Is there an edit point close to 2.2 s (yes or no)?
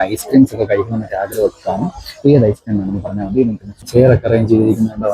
no